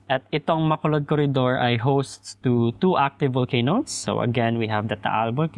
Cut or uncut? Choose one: uncut